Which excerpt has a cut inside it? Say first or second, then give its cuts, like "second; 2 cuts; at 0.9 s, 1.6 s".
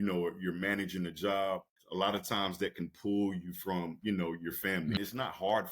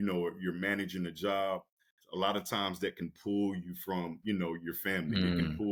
first; 2 cuts; at 1.8 s, 5.0 s